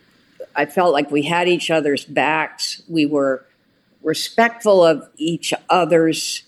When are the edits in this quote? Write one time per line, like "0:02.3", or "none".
0:05.1